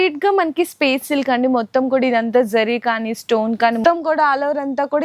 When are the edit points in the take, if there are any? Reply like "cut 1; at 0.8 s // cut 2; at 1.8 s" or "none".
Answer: cut 1; at 3.8 s

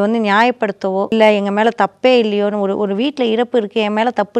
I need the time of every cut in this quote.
cut 1; at 1.1 s

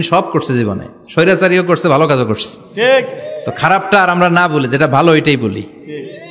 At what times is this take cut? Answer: none

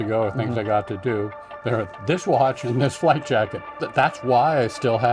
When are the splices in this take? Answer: cut 1; at 3.8 s

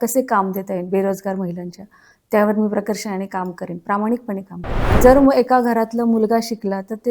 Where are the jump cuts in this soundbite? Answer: cut 1; at 4.9 s

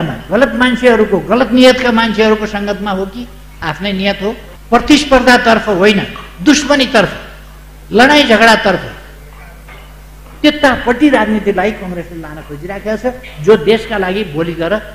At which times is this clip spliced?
cut 1; at 4.5 s

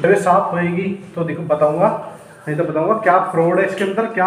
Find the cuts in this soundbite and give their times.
none

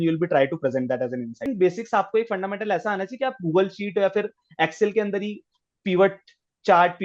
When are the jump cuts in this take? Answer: cut 1; at 1.5 s

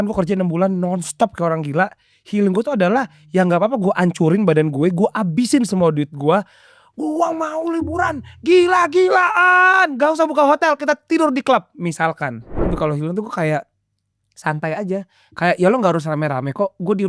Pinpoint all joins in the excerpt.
cut 1; at 12.7 s

